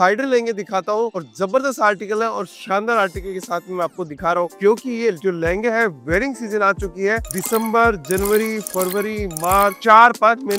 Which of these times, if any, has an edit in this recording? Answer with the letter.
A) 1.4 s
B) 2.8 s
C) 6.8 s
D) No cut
D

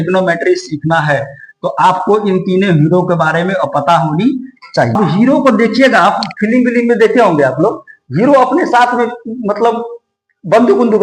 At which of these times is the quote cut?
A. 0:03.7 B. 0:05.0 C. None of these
B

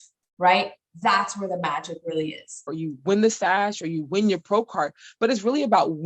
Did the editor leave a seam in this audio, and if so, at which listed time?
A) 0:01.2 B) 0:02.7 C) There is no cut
B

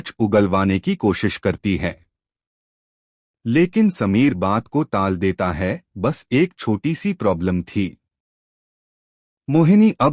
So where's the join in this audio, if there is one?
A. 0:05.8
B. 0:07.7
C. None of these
A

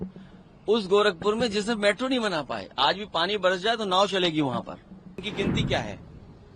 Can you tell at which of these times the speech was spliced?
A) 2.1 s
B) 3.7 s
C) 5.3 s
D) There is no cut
C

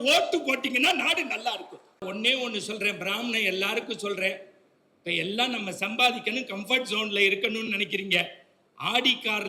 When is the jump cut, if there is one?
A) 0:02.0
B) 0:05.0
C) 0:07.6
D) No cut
A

